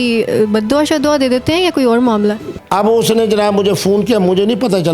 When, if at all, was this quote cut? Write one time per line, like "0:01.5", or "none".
0:02.5